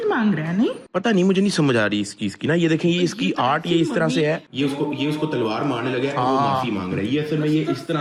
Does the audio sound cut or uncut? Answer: uncut